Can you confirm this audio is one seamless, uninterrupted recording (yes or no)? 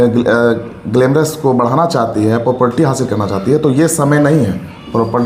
yes